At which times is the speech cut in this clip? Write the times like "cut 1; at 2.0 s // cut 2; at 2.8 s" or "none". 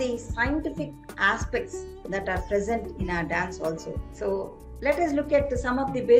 cut 1; at 4.0 s